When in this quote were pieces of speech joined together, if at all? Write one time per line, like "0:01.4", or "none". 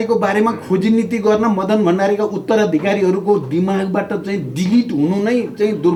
none